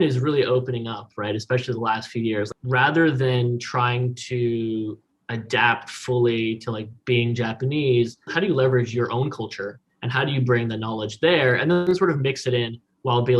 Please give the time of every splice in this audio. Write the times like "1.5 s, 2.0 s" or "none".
2.5 s, 8.3 s, 9.9 s, 11.8 s